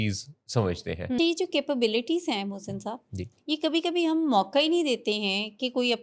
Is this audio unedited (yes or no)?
no